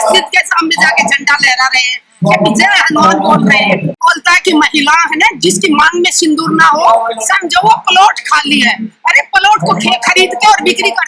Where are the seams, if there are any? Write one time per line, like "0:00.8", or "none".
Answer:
0:04.0